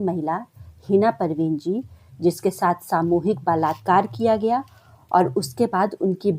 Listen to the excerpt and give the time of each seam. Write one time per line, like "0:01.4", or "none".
none